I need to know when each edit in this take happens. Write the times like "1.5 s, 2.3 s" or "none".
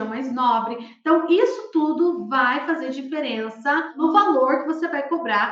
4.0 s